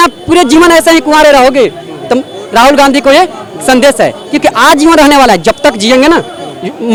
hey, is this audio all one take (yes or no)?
yes